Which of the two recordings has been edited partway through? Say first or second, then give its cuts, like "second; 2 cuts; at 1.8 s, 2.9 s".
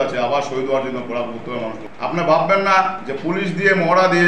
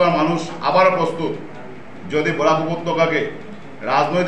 first; 1 cut; at 1.9 s